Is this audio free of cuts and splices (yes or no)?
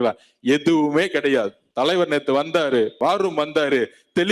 no